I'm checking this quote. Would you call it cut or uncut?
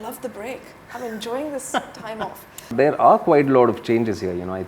cut